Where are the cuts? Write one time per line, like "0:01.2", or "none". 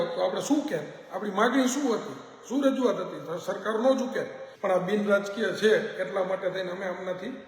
0:04.5

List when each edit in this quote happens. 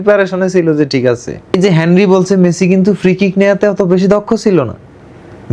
0:01.5

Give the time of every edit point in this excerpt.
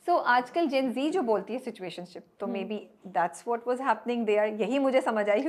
none

